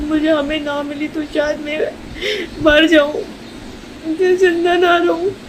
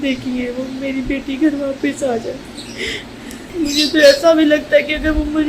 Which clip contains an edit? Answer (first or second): second